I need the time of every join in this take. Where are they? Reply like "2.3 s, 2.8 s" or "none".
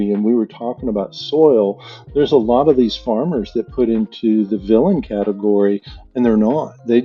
none

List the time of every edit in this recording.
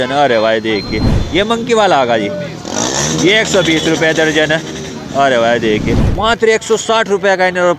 1.2 s, 6.0 s

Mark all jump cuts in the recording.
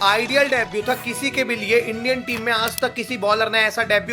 none

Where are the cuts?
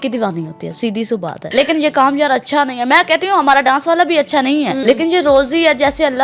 1.4 s, 4.8 s

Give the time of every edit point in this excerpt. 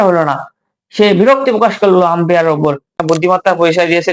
3.0 s

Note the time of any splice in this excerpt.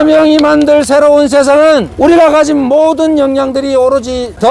1.9 s

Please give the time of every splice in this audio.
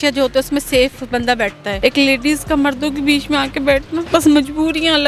1.7 s, 4.1 s

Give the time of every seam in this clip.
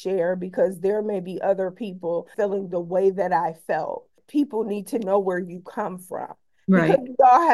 2.3 s, 4.2 s

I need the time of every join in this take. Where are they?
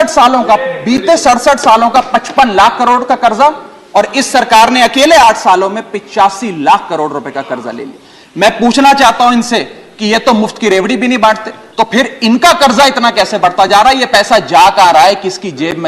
11.6 s

